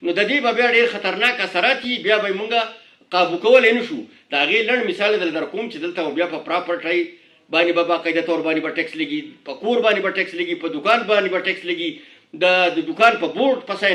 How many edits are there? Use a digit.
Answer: 0